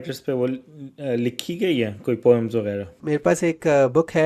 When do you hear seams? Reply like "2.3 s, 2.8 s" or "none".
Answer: 3.0 s